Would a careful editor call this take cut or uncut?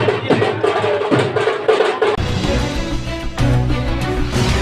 uncut